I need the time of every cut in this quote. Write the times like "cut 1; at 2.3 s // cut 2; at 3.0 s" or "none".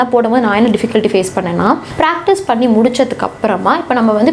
cut 1; at 1.9 s